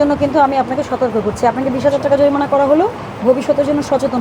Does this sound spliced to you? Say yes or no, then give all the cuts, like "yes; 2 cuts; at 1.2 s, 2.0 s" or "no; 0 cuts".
no; 0 cuts